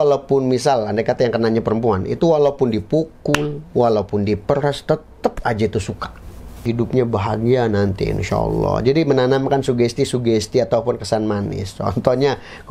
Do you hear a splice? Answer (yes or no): yes